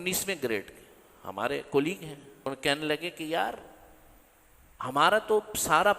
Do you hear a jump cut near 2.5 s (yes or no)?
yes